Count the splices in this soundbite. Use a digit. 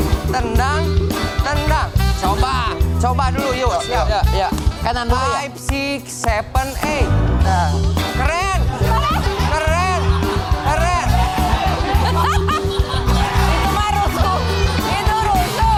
0